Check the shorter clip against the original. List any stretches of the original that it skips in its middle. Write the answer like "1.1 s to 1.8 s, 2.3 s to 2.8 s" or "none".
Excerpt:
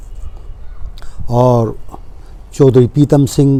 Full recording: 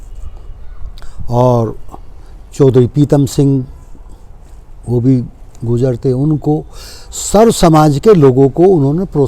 none